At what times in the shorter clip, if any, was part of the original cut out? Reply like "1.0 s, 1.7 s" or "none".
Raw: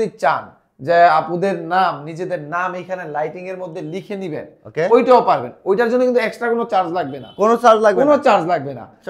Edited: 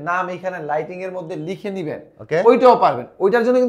none